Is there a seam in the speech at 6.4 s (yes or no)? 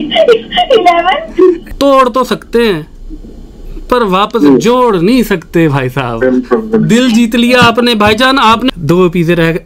no